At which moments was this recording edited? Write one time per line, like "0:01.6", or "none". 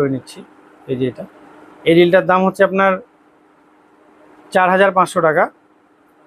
none